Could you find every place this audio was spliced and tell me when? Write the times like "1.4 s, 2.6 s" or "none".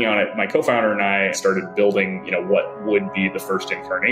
1.3 s